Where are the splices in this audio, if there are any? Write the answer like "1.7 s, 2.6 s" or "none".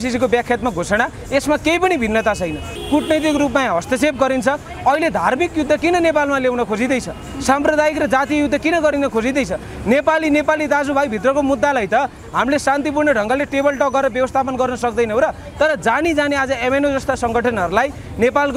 2.7 s